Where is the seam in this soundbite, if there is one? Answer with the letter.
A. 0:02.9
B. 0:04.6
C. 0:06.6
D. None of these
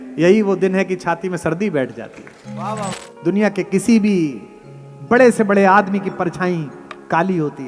A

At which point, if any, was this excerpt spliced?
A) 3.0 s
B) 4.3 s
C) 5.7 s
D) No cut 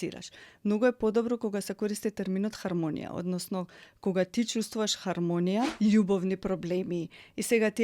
C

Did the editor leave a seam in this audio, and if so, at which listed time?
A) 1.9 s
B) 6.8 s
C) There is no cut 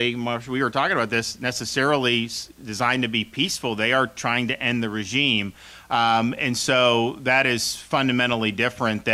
C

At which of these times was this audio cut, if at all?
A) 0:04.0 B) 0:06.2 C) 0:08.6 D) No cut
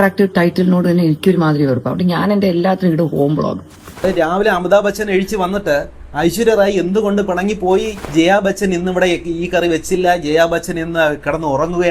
A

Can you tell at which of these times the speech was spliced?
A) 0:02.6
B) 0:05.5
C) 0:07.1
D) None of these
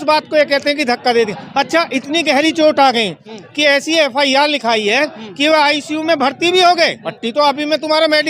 C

